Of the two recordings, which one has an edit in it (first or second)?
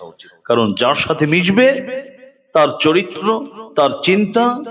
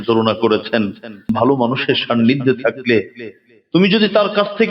second